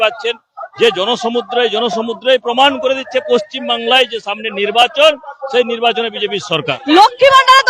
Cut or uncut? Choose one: cut